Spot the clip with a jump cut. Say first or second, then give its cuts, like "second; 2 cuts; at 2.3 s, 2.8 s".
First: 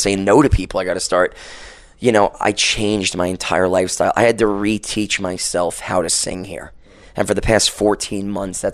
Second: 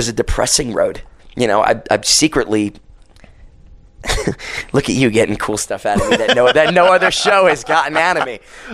second; 1 cut; at 1.1 s